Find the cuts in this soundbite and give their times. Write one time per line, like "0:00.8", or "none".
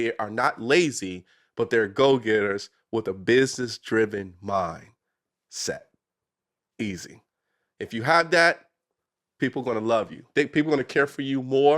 0:10.3